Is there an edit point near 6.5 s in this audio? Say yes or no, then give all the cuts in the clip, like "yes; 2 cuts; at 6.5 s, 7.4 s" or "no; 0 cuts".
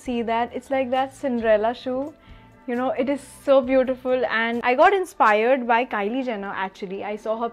no; 1 cut; at 4.6 s